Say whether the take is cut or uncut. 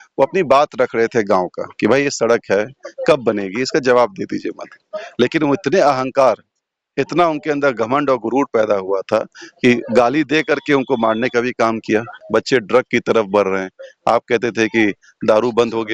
cut